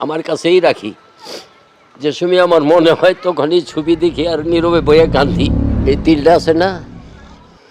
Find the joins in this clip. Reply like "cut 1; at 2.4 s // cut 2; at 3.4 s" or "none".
cut 1; at 5.7 s